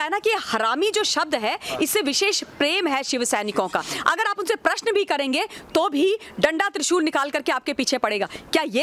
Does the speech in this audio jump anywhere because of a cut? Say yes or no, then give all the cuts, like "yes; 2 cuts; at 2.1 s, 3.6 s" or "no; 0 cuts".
yes; 1 cut; at 3.9 s